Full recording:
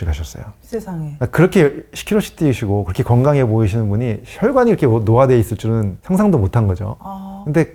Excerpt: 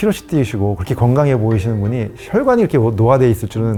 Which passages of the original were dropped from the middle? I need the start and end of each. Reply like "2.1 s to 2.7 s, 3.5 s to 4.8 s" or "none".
none